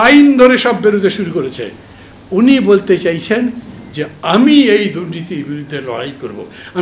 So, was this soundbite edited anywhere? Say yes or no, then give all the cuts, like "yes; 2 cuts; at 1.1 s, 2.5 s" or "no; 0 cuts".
no; 0 cuts